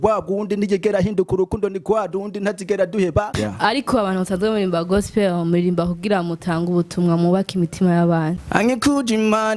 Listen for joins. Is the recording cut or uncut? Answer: cut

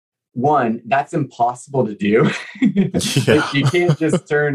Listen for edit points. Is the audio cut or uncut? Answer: uncut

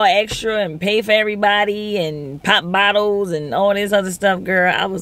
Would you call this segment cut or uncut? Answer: uncut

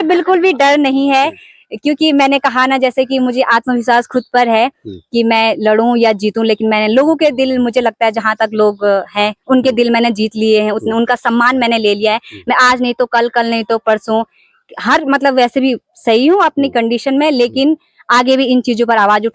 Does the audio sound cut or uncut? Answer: uncut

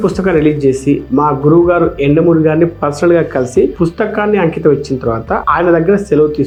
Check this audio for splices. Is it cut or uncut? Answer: uncut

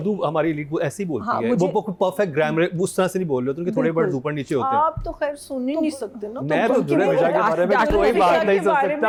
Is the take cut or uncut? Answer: uncut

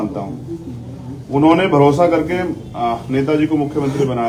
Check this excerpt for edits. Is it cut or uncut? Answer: uncut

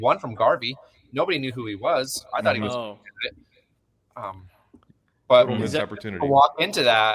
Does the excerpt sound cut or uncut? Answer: uncut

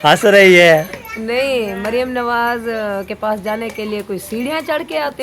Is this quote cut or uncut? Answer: uncut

